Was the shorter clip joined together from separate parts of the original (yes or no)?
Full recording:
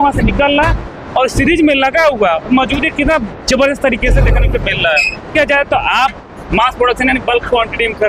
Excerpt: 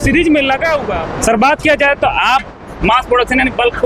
yes